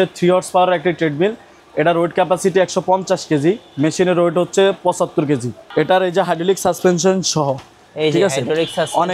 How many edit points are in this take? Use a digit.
1